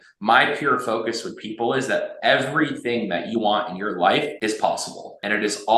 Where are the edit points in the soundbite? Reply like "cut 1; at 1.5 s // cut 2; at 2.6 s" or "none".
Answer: cut 1; at 4.7 s